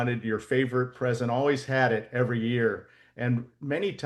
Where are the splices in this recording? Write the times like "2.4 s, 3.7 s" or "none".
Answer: none